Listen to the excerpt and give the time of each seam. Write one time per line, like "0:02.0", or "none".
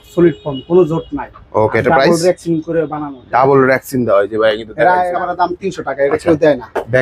0:05.0